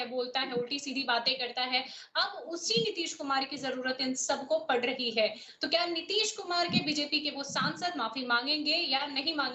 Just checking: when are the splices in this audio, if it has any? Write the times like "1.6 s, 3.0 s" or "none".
none